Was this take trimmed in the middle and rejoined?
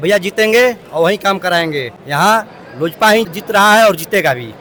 no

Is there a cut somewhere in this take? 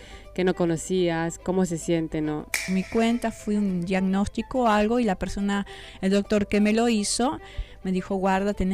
yes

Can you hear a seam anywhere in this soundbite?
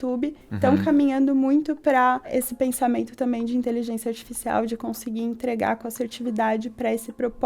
yes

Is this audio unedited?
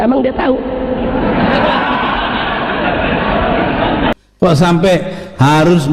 no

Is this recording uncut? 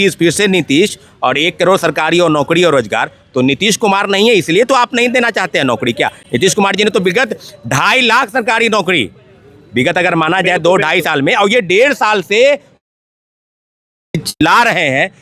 yes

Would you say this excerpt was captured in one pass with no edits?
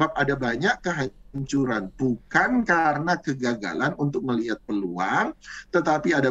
yes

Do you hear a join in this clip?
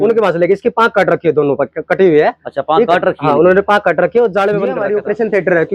yes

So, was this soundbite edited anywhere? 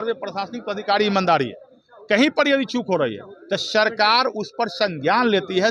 no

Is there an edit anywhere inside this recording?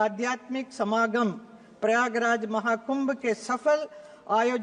no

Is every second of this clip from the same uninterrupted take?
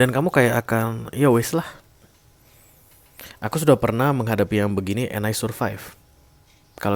yes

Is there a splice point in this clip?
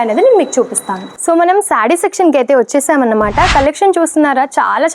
no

